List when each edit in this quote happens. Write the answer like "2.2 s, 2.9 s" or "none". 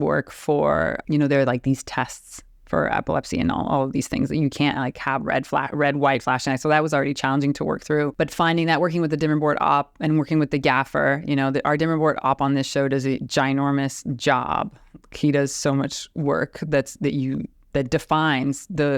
1.0 s, 8.1 s